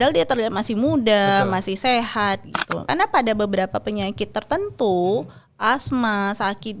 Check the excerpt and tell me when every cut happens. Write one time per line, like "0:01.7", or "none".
0:02.7